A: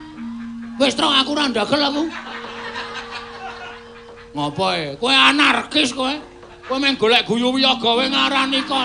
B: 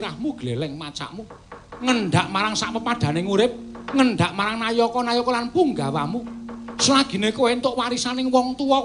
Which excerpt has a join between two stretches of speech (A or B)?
B